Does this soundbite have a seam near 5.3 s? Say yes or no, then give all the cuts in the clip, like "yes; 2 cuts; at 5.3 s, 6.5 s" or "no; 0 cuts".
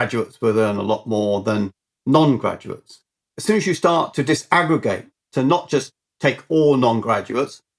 yes; 2 cuts; at 3.3 s, 5.3 s